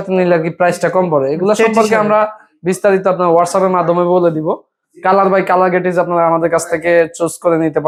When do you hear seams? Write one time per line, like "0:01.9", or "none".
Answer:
none